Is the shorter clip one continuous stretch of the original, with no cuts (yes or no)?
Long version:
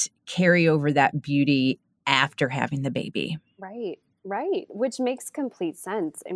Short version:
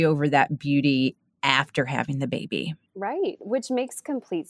no